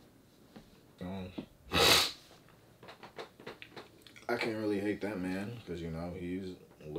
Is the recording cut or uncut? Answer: cut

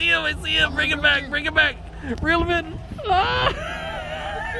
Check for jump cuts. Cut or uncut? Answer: uncut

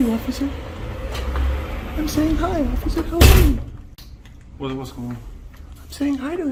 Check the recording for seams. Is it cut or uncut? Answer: uncut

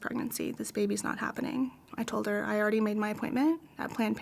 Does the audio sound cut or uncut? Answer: cut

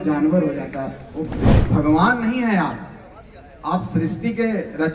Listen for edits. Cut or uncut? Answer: cut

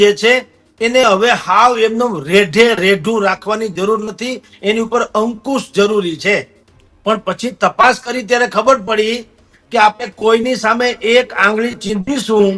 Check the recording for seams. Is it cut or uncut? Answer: uncut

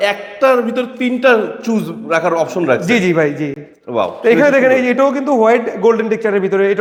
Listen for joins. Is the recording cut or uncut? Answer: uncut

